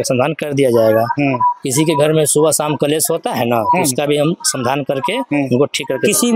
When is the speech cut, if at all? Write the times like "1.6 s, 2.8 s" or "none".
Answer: none